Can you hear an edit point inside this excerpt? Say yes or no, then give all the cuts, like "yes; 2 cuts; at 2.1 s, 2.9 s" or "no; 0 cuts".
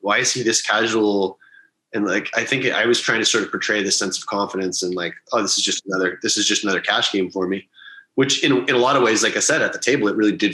no; 0 cuts